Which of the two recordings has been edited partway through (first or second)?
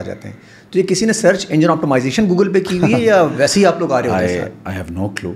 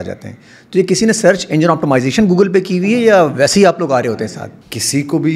second